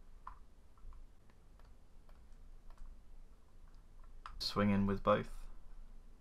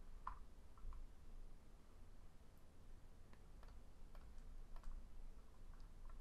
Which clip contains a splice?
first; 2 cuts; at 1.6 s, 4.5 s

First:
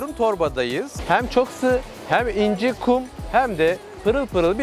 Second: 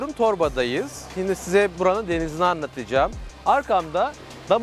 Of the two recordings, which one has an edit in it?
first; 1 cut; at 0.9 s

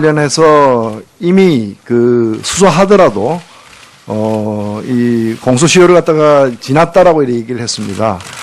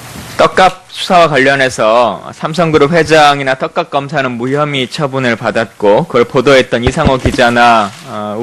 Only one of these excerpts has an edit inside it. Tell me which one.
first; 1 cut; at 2.4 s

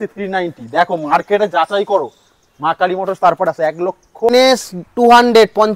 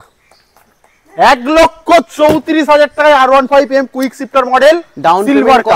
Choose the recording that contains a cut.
first; 1 cut; at 4.3 s

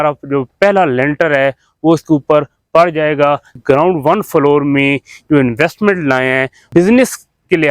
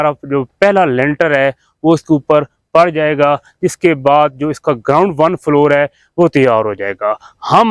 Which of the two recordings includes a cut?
first; 2 cuts; at 3.6 s, 6.7 s

